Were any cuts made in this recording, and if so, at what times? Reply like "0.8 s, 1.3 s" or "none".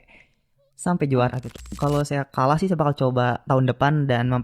1.5 s

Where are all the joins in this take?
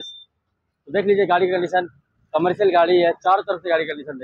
none

